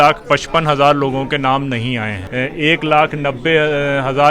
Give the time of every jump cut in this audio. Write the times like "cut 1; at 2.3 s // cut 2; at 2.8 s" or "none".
cut 1; at 2.2 s